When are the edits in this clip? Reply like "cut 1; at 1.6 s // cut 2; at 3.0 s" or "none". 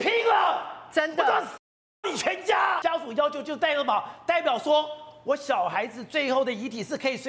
cut 1; at 2.8 s